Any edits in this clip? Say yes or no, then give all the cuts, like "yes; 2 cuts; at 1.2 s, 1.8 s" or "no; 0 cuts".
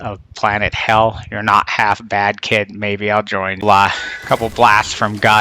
yes; 1 cut; at 3.6 s